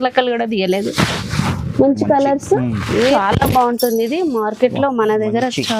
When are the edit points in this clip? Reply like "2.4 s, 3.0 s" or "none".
3.1 s